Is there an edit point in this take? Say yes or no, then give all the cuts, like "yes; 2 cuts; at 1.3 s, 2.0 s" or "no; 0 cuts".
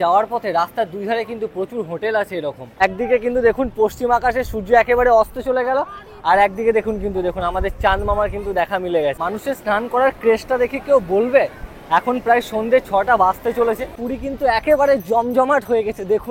yes; 3 cuts; at 2.8 s, 9.2 s, 14.1 s